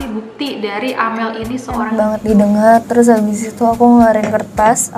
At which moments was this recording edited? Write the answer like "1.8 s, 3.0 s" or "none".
1.9 s